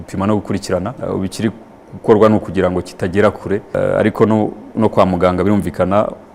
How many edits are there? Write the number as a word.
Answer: two